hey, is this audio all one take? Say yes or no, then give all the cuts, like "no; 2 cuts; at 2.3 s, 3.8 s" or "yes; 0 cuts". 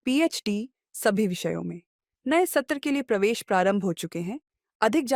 yes; 0 cuts